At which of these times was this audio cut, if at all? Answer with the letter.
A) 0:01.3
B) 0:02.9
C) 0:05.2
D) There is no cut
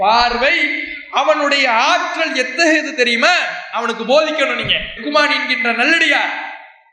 D